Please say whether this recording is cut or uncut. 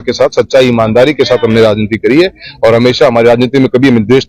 uncut